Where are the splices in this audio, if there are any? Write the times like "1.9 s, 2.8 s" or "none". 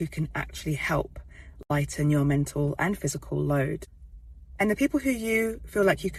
none